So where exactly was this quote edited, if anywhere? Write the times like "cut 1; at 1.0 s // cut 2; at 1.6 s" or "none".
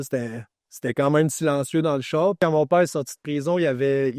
cut 1; at 2.4 s